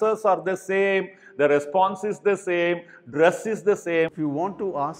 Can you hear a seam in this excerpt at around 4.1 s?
yes; 1 cut; at 4.1 s

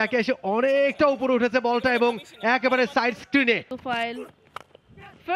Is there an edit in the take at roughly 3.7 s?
yes; 1 cut; at 3.7 s

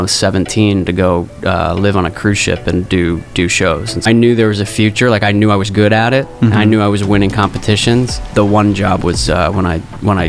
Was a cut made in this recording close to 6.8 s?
no; 2 cuts; at 4.0 s, 8.3 s

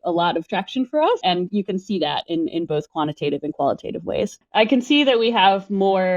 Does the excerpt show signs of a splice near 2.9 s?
no; 2 cuts; at 1.2 s, 4.4 s

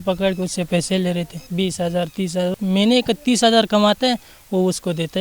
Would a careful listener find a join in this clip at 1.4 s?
yes; 2 cuts; at 1.4 s, 2.5 s

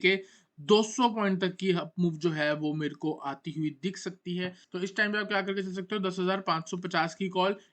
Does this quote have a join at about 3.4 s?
no; 1 cut; at 4.6 s

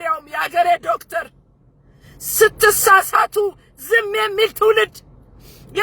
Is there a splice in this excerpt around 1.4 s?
no; 0 cuts

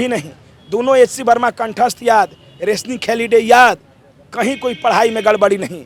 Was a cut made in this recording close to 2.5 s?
no; 0 cuts

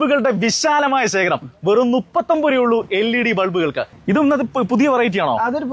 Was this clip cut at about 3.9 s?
yes; 1 cut; at 3.9 s

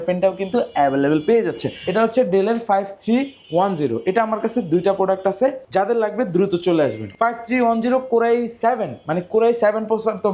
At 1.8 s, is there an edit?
yes; 3 cuts; at 1.8 s, 5.6 s, 7.1 s

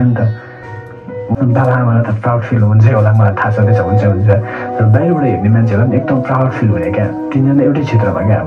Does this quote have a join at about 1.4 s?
yes; 1 cut; at 1.4 s

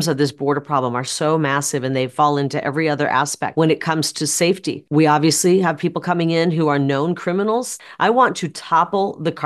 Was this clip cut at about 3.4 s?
yes; 3 cuts; at 3.4 s, 4.7 s, 7.7 s

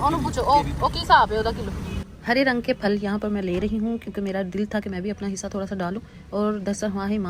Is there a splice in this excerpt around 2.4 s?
no; 0 cuts

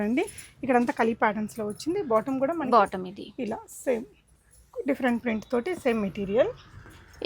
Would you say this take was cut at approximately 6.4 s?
no; 0 cuts

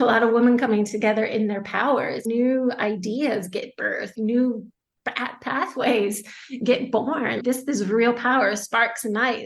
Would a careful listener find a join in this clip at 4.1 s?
yes; 3 cuts; at 2.2 s, 4.1 s, 7.4 s

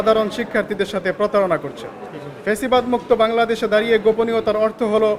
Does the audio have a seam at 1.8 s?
no; 0 cuts

